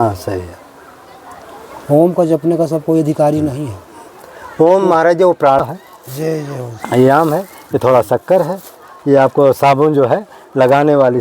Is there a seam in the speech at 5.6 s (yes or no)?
yes